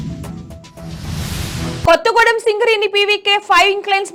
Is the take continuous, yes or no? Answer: yes